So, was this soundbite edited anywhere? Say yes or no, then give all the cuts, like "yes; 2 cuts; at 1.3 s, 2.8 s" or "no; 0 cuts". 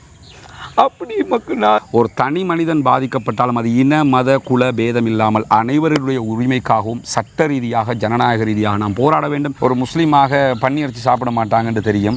yes; 2 cuts; at 1.8 s, 9.5 s